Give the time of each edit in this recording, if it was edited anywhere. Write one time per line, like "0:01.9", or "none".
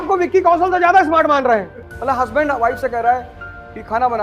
0:01.8